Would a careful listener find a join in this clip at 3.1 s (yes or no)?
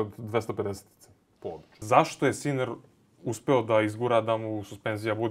no